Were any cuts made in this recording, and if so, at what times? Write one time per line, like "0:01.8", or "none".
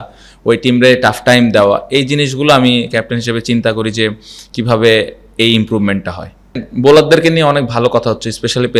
0:06.6